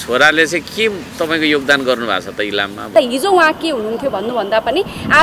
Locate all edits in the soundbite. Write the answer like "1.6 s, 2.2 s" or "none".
2.9 s